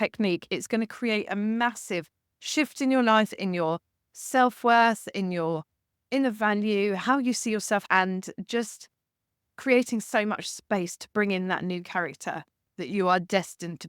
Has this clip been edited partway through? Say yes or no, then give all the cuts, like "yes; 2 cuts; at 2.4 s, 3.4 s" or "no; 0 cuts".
yes; 2 cuts; at 3.4 s, 7.8 s